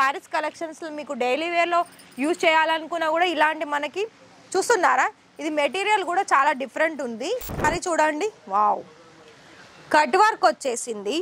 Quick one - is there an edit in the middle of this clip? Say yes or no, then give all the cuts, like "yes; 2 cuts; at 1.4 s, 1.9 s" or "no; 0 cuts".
yes; 1 cut; at 7.6 s